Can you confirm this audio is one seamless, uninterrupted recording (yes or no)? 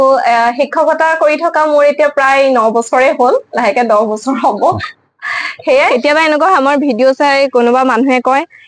no